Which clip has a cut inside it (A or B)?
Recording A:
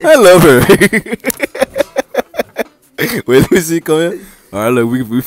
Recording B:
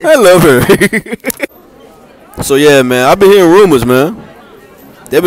B